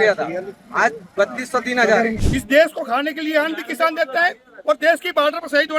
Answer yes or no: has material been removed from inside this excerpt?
yes